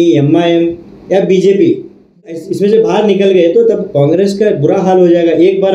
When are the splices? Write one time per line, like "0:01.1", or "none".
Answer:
0:02.5